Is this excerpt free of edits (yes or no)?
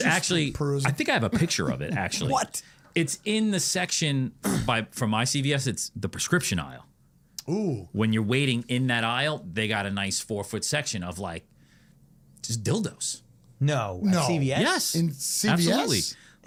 yes